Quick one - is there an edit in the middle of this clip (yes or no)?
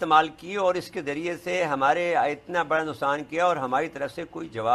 no